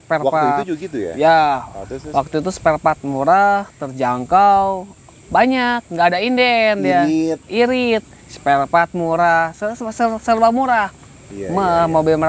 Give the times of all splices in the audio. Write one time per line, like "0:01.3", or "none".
none